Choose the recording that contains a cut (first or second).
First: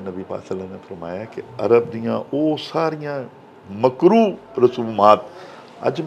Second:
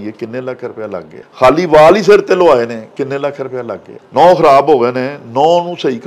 second